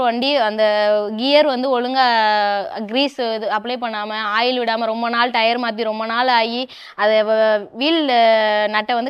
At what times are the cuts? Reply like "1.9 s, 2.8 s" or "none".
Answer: none